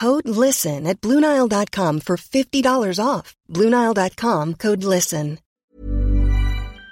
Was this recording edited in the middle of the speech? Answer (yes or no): yes